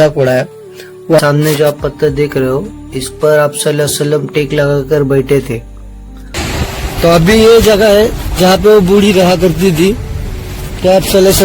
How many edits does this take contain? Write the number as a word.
two